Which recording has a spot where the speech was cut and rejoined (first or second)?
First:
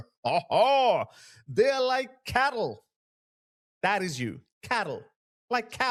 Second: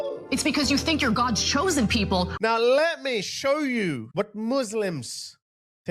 second